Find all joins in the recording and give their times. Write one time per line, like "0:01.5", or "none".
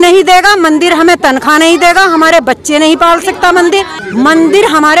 0:04.0